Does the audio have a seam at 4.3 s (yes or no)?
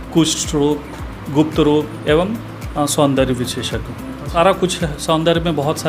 yes